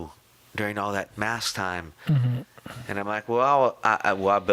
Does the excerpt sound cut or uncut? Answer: uncut